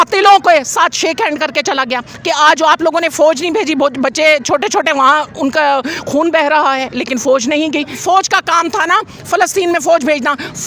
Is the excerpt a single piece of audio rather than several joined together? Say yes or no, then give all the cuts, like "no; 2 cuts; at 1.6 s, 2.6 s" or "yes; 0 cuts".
no; 1 cut; at 8.0 s